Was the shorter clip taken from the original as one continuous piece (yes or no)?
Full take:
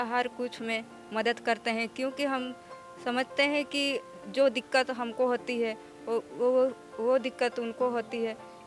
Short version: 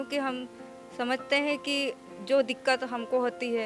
yes